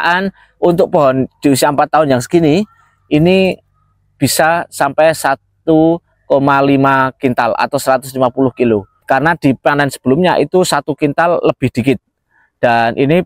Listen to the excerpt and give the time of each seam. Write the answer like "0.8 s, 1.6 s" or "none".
9.0 s